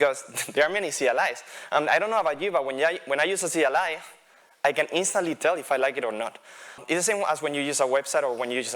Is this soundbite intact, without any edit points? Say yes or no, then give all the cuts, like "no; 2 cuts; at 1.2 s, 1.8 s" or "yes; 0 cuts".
no; 1 cut; at 6.8 s